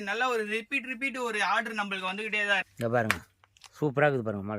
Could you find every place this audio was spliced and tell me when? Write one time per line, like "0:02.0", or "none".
0:02.7

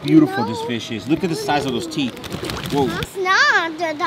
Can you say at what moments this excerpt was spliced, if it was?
0:03.1

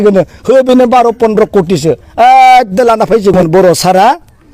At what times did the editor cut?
0:03.3

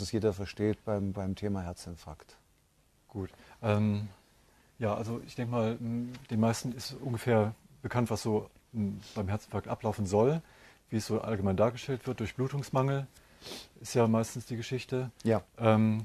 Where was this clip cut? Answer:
0:03.2

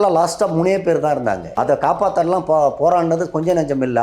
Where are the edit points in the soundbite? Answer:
0:01.5

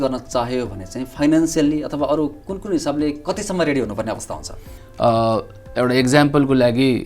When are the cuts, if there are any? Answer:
0:04.8

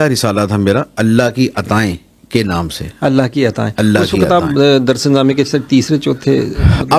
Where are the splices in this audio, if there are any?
none

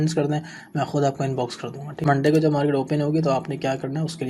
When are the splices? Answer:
0:02.0

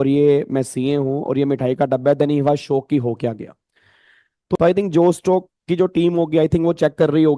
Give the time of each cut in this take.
0:04.5

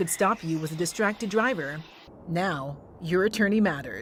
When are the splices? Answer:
none

